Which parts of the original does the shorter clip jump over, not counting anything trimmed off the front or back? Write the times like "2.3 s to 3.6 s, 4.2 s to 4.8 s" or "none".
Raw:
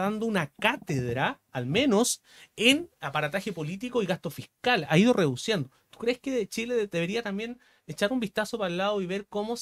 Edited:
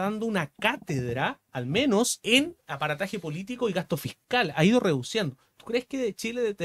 2.2 s to 2.5 s